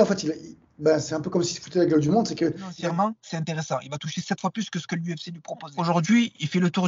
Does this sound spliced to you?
yes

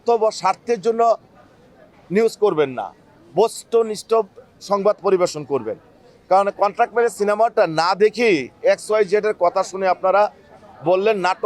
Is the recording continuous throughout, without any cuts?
yes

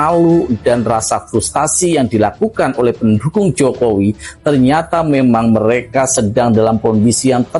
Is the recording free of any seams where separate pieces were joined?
yes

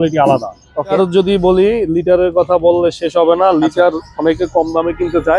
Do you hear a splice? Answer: yes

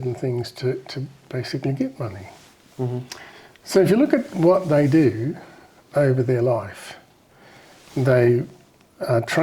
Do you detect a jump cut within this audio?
no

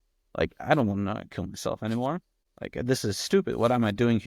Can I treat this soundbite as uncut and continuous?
yes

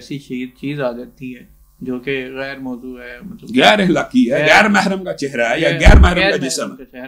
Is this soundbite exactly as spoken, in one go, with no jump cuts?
yes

